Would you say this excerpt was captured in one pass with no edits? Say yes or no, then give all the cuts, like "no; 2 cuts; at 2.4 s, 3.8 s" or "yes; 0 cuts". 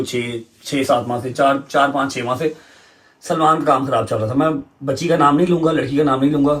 yes; 0 cuts